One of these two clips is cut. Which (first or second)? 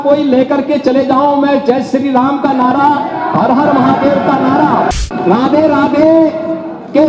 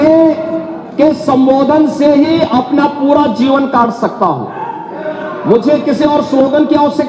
first